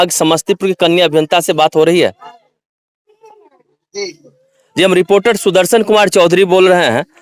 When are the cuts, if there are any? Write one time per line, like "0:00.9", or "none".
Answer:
none